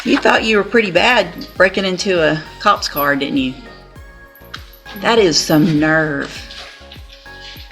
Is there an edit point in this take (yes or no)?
no